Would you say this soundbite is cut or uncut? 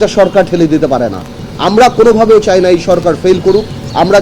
cut